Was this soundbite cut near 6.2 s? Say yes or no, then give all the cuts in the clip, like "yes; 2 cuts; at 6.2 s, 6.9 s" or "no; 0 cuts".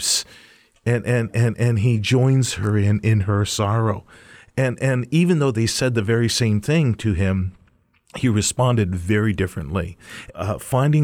no; 1 cut; at 10.1 s